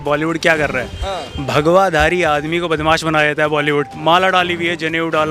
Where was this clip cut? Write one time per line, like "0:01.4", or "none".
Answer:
0:03.9